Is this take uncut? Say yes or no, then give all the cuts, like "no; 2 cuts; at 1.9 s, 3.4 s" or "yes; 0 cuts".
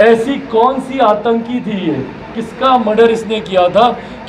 no; 1 cut; at 2.4 s